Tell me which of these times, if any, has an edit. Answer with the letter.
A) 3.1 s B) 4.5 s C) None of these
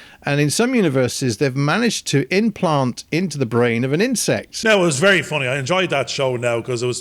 B